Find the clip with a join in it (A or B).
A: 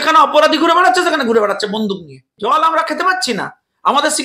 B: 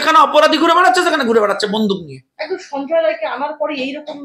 A